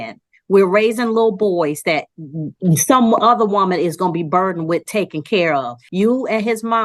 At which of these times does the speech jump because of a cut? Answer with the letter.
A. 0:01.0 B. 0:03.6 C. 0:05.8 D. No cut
C